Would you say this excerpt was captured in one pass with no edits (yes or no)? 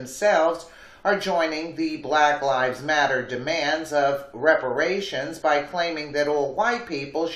yes